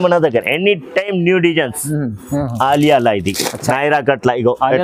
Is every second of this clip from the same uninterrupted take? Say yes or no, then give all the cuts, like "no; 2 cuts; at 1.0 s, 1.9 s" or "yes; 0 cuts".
no; 1 cut; at 2.3 s